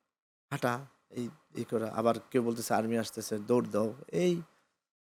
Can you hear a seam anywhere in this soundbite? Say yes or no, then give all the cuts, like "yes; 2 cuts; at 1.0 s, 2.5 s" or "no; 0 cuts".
no; 0 cuts